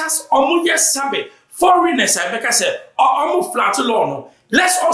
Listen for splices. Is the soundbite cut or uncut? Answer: uncut